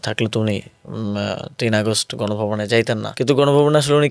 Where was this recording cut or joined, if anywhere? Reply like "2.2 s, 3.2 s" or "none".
3.1 s